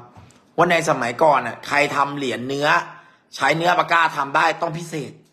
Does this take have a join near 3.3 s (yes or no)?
no